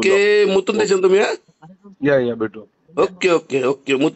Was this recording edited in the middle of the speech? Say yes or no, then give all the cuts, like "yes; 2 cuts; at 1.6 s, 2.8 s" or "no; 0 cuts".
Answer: no; 0 cuts